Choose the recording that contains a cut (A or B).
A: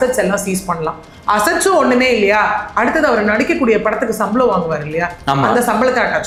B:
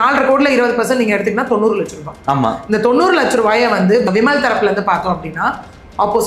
B